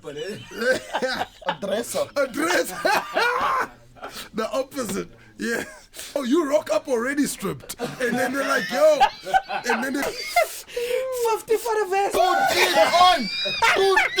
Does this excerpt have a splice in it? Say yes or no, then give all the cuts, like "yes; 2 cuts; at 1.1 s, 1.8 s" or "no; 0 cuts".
yes; 2 cuts; at 6.2 s, 10.1 s